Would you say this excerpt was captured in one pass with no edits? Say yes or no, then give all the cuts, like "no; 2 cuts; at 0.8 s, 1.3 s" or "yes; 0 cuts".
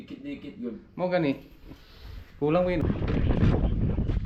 no; 1 cut; at 2.8 s